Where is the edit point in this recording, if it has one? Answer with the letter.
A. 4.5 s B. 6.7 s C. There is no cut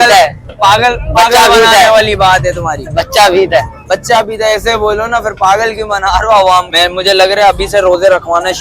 B